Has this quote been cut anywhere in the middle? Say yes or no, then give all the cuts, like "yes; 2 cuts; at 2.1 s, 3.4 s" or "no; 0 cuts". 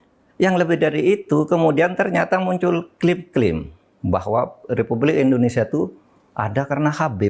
no; 0 cuts